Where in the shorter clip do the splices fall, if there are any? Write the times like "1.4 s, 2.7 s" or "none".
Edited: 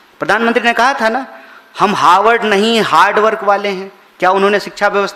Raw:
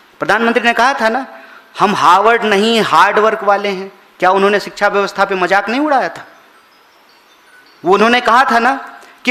none